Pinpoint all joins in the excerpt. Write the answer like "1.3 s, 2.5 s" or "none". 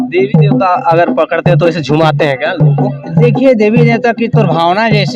none